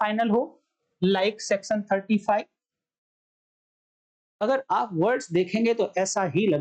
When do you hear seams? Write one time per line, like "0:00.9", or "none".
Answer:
none